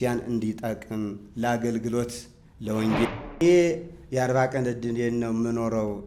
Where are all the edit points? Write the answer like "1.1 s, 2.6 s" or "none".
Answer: 3.1 s